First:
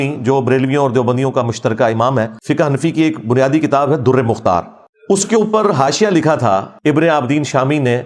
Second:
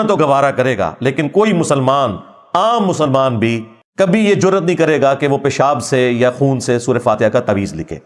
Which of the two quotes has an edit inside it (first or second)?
first